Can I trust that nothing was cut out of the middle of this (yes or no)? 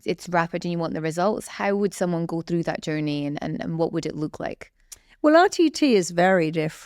yes